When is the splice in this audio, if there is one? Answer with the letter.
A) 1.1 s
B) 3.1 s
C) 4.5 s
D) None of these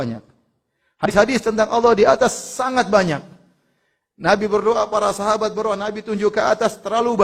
A